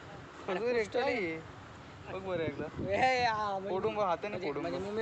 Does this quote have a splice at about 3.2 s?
no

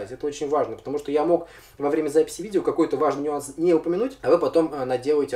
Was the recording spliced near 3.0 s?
no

